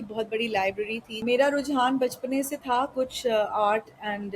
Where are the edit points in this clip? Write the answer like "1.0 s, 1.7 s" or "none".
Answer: 1.2 s